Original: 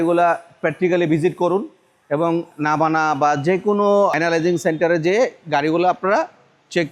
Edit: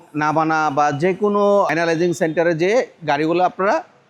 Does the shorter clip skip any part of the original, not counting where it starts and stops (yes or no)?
no